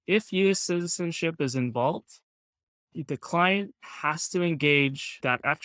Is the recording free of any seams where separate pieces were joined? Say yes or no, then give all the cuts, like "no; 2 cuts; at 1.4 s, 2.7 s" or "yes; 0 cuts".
no; 1 cut; at 2.8 s